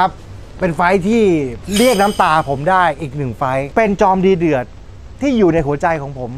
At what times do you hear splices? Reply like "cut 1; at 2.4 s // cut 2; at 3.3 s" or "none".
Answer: cut 1; at 1.6 s // cut 2; at 3.7 s